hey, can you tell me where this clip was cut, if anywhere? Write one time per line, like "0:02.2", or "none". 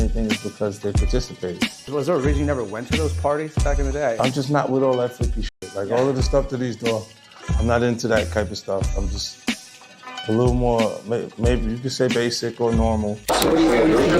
0:13.2